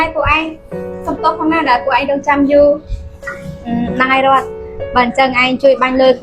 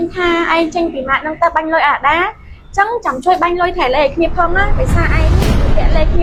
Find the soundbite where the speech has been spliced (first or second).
first